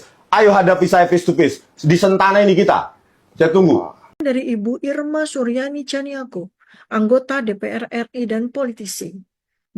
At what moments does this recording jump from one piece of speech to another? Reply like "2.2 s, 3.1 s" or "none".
4.0 s

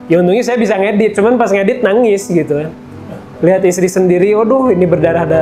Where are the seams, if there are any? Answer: none

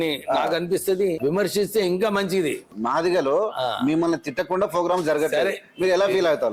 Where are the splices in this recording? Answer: 1.2 s, 2.7 s

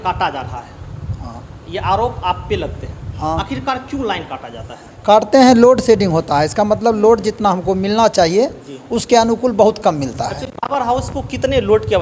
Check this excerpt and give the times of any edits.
none

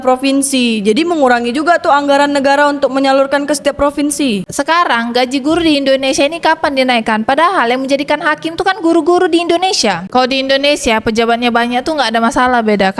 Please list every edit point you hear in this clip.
4.4 s, 10.1 s

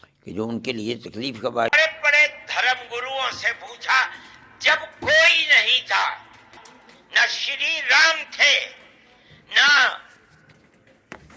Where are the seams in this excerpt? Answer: 1.7 s

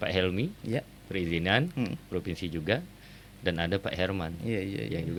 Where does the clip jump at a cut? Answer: none

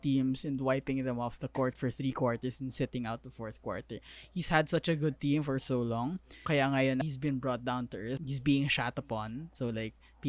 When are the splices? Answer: 6.4 s, 7.0 s, 8.2 s

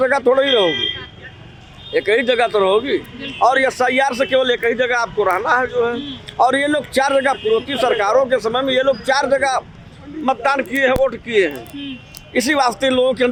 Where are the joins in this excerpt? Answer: none

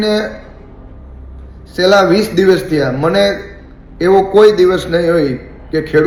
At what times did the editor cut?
none

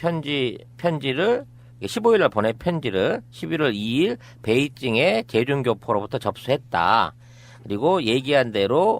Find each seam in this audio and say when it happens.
1.5 s

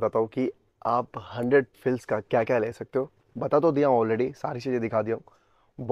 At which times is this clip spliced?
none

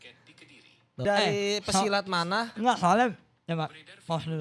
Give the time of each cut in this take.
1.0 s

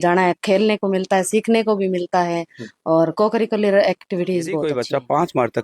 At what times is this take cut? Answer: 4.7 s

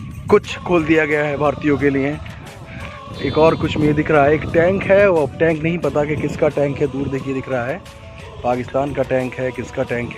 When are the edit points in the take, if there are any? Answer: 2.4 s

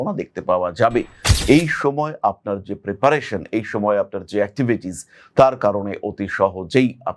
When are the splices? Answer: 1.2 s

